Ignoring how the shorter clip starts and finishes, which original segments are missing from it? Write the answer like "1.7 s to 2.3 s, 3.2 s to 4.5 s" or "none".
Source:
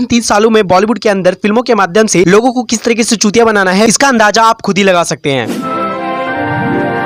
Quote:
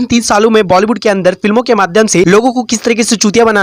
none